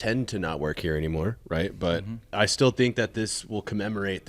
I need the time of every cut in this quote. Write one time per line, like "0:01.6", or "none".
0:02.3